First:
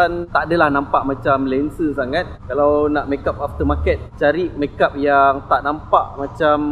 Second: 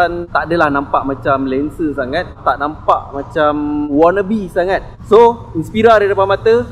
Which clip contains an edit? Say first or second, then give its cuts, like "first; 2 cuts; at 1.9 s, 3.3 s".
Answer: second; 3 cuts; at 2.4 s, 3.9 s, 4.9 s